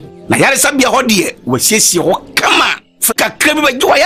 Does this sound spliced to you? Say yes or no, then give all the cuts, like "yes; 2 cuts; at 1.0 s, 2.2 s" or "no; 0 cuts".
no; 0 cuts